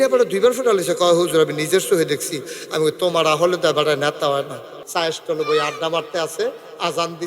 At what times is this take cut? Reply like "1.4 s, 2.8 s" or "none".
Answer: 4.8 s

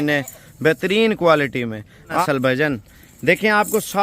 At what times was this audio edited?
2.2 s

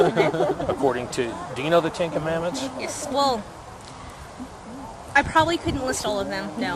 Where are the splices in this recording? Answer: 3.8 s

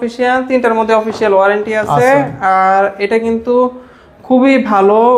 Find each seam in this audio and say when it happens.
none

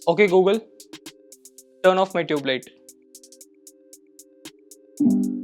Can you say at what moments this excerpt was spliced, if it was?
none

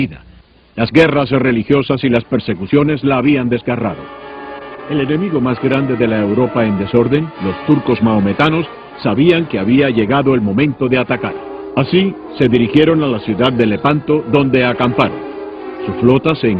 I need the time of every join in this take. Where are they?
4.9 s

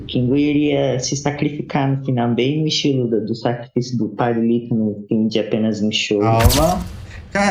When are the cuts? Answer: 6.3 s

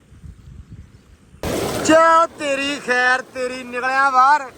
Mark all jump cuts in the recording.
0.9 s

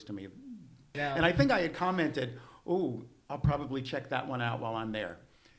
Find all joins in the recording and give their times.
0.9 s

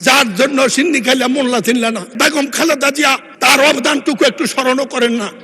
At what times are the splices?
2.1 s

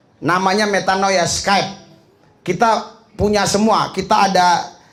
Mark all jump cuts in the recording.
none

